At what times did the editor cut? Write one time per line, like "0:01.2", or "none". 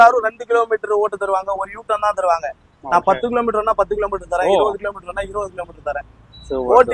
none